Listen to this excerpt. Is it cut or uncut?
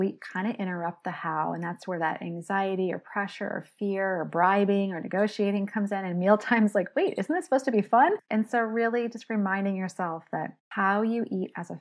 cut